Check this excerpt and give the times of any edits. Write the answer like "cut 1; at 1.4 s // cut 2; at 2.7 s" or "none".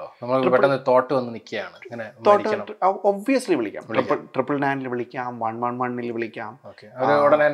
none